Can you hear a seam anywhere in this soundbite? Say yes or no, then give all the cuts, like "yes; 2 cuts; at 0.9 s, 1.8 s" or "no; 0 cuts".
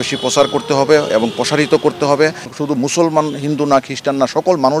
yes; 1 cut; at 2.4 s